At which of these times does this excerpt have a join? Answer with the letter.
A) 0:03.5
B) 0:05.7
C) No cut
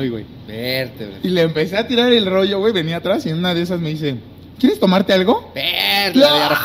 C